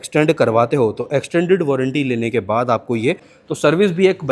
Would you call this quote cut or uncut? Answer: cut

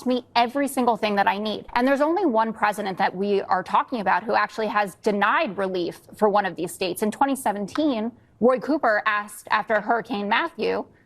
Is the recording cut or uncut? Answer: cut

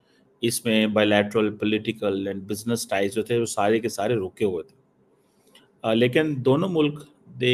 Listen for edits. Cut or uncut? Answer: uncut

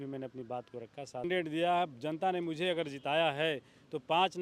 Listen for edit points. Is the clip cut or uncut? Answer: cut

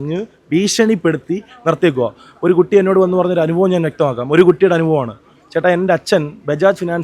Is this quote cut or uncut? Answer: uncut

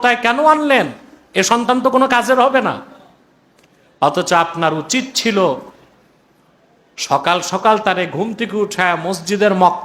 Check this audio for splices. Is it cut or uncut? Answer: uncut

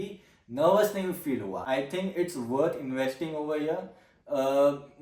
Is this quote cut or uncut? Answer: cut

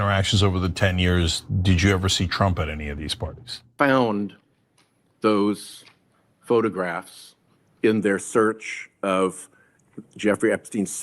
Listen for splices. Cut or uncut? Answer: cut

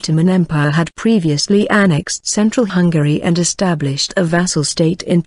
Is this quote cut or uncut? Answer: uncut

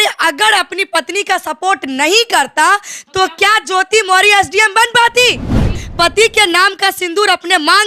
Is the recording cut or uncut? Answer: cut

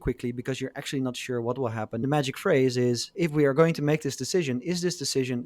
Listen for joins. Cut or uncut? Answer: cut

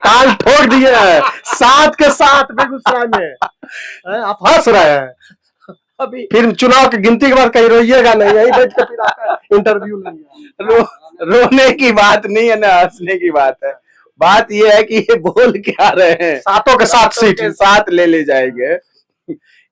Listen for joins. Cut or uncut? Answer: uncut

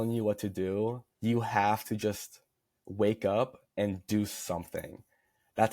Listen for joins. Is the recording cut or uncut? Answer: cut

